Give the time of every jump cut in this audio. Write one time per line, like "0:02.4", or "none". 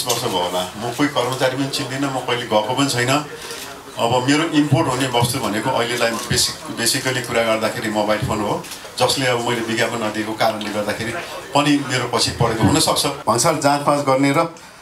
0:08.8
0:13.1